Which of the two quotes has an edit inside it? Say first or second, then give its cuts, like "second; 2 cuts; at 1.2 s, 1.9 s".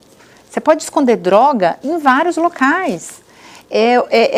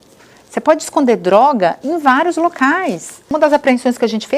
second; 1 cut; at 3.3 s